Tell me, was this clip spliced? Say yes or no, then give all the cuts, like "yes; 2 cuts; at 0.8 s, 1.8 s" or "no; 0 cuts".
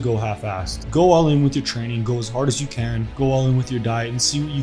no; 0 cuts